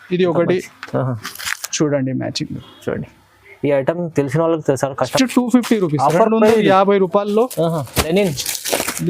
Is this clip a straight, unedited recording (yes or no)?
no